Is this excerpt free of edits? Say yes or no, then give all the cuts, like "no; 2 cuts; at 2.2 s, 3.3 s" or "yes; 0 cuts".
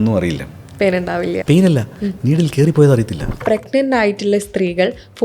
no; 2 cuts; at 1.3 s, 3.4 s